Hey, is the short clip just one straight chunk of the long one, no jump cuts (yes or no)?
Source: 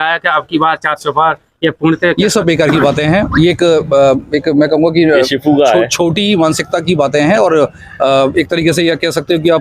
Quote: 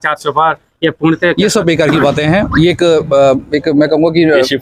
yes